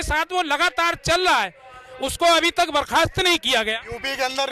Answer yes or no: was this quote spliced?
no